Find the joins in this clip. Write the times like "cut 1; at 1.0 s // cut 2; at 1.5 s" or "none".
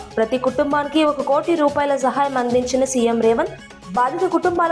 none